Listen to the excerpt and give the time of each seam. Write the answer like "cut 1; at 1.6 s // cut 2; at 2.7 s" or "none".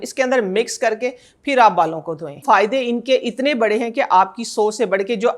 cut 1; at 2.4 s